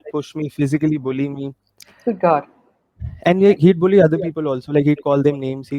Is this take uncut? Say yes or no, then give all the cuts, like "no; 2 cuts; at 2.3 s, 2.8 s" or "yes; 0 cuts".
yes; 0 cuts